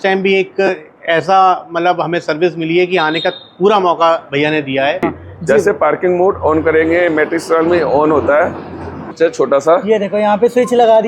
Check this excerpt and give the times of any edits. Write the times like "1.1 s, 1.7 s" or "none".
5.0 s, 9.0 s